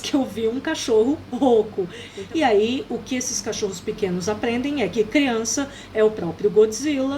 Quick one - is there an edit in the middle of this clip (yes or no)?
yes